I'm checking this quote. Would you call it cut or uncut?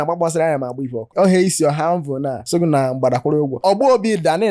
cut